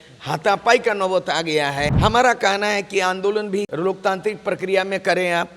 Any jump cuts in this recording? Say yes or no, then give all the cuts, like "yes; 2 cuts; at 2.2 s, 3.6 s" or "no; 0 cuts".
yes; 2 cuts; at 1.9 s, 3.7 s